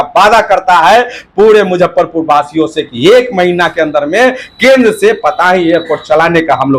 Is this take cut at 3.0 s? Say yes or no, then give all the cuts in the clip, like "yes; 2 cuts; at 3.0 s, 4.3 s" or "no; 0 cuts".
no; 0 cuts